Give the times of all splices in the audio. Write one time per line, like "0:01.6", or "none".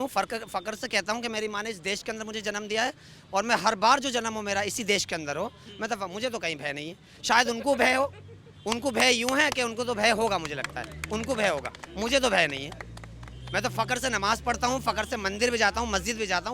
none